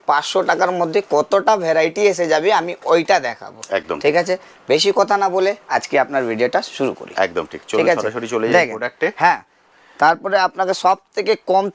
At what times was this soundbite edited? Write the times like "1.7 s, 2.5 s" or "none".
none

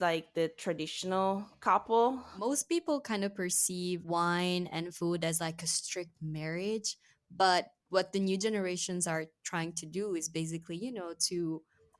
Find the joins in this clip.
2.3 s, 4.0 s

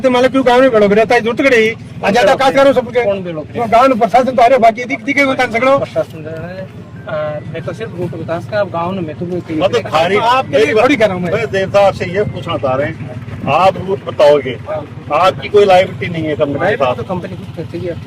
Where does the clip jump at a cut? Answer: none

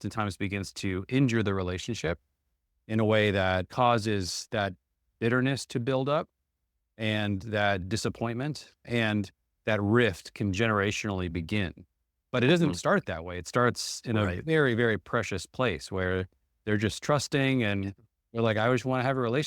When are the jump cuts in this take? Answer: 3.7 s, 8.8 s

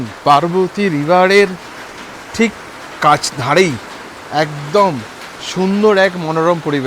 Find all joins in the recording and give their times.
none

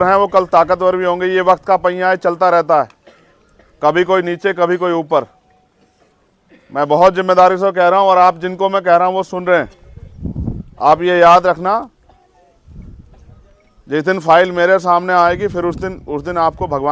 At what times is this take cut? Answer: none

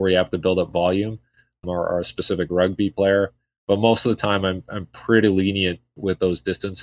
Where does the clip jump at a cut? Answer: 1.6 s

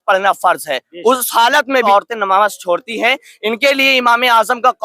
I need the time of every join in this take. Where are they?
1.9 s

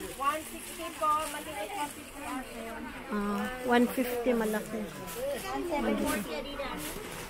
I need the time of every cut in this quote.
none

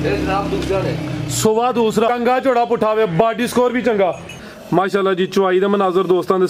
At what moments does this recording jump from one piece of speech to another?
2.1 s, 4.4 s

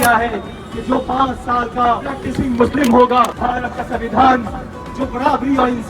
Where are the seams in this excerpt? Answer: 3.3 s

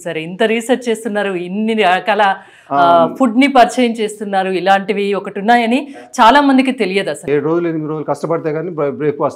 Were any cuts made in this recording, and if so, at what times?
7.2 s

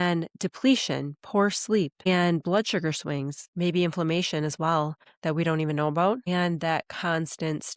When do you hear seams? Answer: 2.1 s, 3.4 s, 5.1 s, 6.2 s

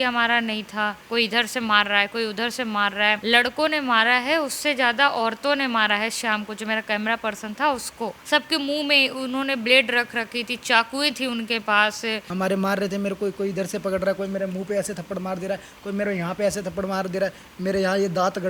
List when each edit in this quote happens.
1.0 s, 3.2 s, 8.2 s, 12.2 s

